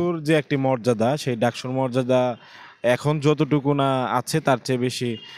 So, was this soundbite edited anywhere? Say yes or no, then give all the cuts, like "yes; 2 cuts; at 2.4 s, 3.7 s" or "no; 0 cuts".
no; 0 cuts